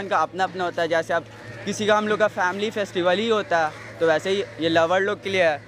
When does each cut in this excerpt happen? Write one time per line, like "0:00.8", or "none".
none